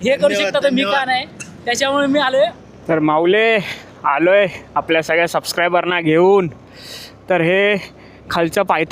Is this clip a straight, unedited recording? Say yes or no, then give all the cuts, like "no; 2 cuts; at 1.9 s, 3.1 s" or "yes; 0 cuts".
no; 1 cut; at 2.6 s